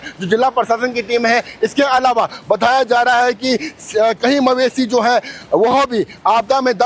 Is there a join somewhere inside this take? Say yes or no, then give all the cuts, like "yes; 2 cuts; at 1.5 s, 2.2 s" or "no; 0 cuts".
yes; 1 cut; at 3.4 s